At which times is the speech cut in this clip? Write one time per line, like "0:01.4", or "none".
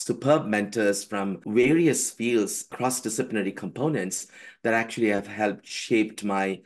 0:01.4
0:02.7